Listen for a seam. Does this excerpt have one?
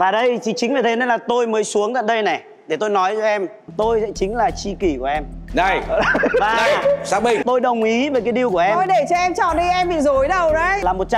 yes; 1 cut; at 3.7 s

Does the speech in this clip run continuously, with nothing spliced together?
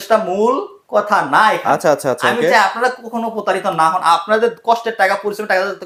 yes; 0 cuts

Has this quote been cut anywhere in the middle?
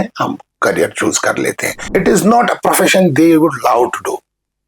yes; 1 cut; at 1.7 s

